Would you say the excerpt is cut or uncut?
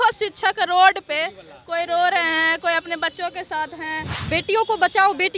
cut